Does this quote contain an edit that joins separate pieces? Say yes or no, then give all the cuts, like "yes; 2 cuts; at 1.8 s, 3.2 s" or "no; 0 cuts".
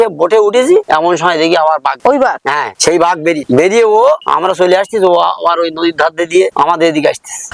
no; 0 cuts